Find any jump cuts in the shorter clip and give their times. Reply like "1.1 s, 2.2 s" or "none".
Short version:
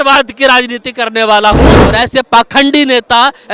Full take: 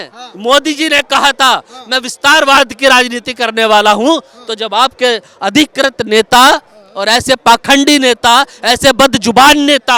1.8 s